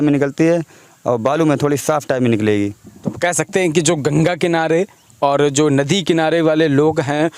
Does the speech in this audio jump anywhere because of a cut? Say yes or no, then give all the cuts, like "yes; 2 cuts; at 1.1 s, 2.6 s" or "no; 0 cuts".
no; 0 cuts